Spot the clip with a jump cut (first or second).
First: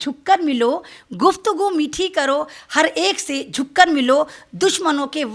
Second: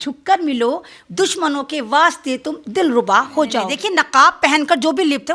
second